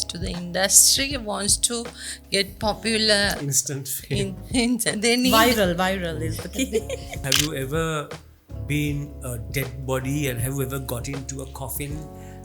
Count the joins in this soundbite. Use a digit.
1